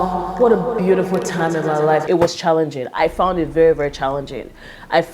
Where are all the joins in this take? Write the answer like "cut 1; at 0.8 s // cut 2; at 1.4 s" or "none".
cut 1; at 2.0 s